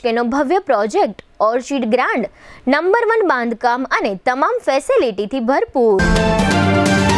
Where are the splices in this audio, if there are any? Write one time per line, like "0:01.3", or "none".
0:06.0